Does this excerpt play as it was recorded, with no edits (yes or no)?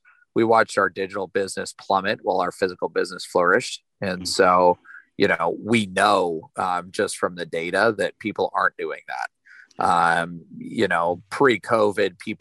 yes